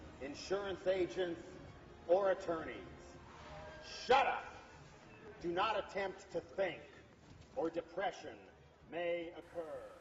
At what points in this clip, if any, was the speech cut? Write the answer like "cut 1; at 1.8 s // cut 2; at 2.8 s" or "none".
none